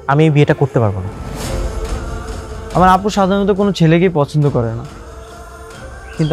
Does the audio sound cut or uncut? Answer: cut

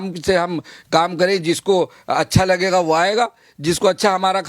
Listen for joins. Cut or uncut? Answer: uncut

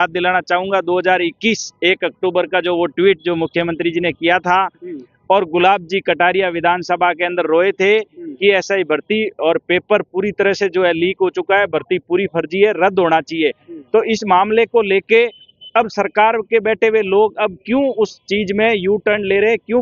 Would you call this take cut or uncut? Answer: uncut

